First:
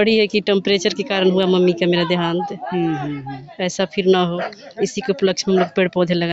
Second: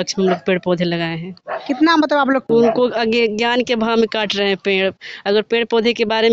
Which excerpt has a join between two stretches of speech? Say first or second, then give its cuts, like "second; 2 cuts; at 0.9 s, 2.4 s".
second; 1 cut; at 2.5 s